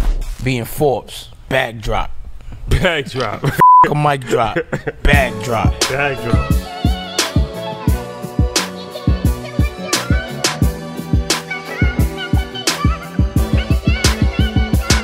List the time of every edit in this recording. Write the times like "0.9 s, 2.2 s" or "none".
none